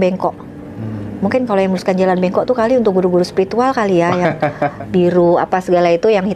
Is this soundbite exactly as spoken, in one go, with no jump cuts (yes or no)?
no